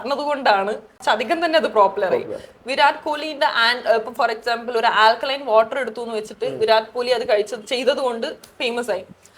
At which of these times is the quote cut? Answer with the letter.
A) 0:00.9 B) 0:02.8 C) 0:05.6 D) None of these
A